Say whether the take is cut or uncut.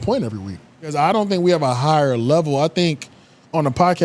cut